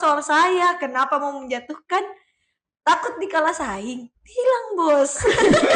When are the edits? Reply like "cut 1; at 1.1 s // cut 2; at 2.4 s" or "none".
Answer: none